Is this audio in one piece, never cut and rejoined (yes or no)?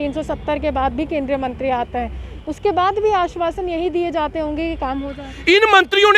yes